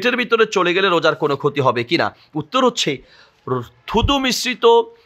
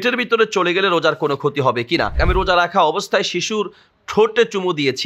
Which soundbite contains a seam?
second; 1 cut; at 2.2 s

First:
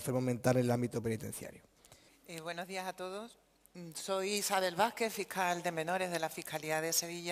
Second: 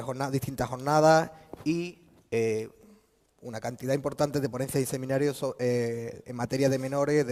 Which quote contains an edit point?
first; 1 cut; at 6.2 s

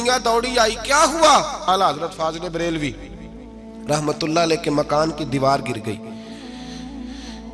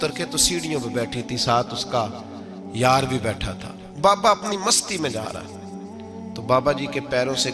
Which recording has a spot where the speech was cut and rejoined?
first; 1 cut; at 1.6 s

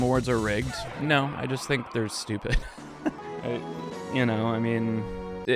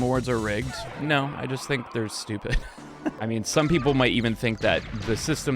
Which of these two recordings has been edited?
second; 1 cut; at 3.2 s

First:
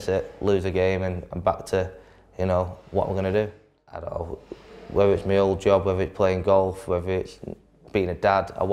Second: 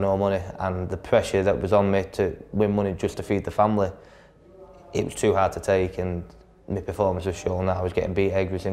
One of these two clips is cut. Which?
first; 1 cut; at 4.0 s

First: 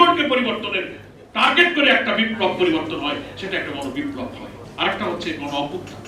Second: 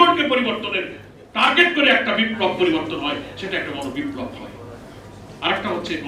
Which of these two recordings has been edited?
first; 1 cut; at 4.6 s

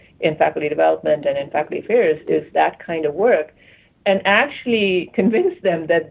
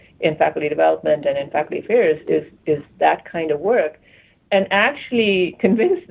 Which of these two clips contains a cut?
first; 1 cut; at 2.5 s

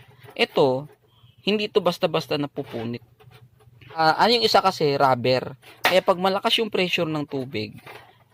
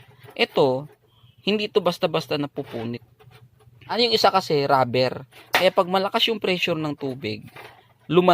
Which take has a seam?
second; 1 cut; at 3.9 s

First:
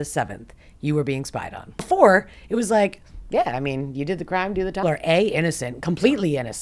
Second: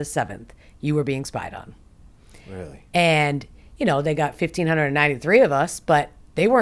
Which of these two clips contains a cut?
first; 2 cuts; at 1.9 s, 4.8 s

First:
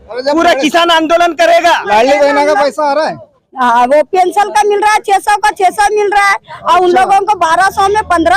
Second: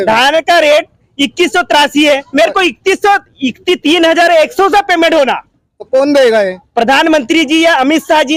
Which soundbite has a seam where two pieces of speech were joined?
first; 1 cut; at 1.8 s

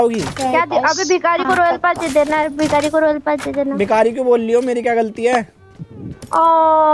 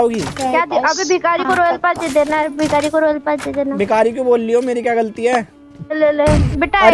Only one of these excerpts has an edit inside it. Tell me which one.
second; 1 cut; at 6.0 s

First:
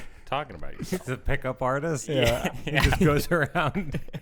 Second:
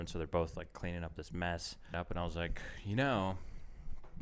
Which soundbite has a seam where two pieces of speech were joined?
second; 1 cut; at 1.9 s

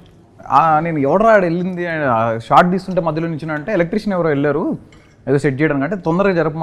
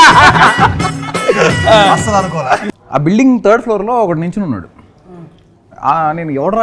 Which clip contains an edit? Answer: second; 1 cut; at 2.6 s

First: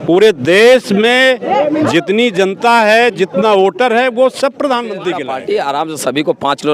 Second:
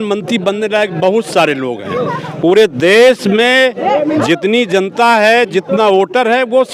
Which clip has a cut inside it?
first; 1 cut; at 5.3 s

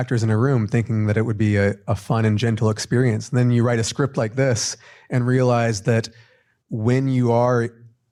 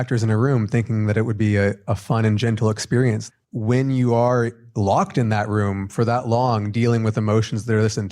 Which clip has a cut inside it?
second; 2 cuts; at 3.2 s, 4.6 s

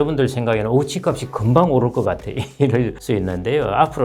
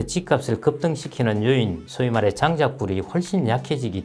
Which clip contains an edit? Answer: first; 1 cut; at 3.0 s

